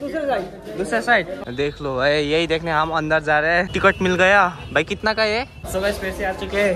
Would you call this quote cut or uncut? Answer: cut